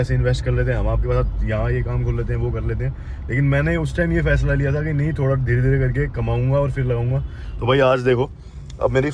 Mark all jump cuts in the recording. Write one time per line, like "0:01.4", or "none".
none